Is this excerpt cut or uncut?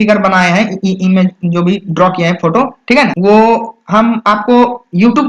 uncut